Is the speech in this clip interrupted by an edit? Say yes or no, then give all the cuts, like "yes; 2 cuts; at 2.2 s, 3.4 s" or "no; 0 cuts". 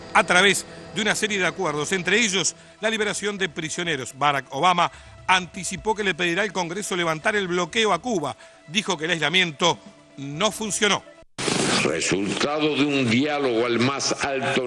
yes; 1 cut; at 11.2 s